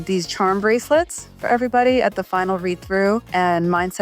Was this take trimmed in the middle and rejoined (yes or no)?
no